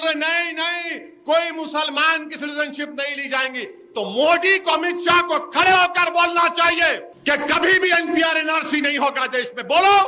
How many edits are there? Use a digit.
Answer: 1